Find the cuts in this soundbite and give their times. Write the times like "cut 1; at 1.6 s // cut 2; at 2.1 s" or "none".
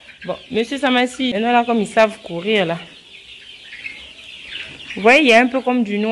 cut 1; at 1.3 s